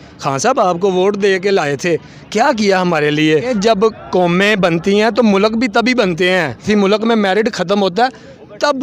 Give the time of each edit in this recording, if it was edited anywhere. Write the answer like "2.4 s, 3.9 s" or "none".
3.5 s, 6.6 s